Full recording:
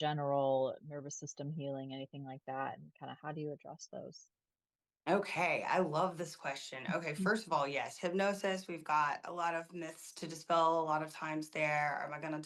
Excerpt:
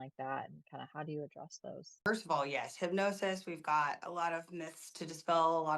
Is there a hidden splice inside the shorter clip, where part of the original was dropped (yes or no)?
yes